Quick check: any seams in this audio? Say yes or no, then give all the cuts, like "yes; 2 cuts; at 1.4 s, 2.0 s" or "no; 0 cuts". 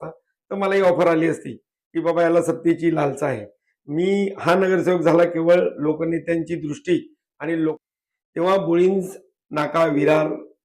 yes; 1 cut; at 7.8 s